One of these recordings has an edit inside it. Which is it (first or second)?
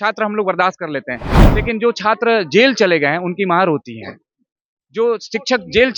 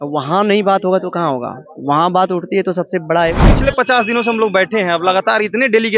second